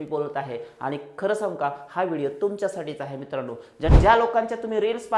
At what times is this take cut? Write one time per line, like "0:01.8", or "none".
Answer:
0:03.9